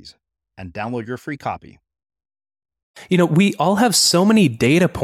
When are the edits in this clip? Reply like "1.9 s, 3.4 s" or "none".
3.0 s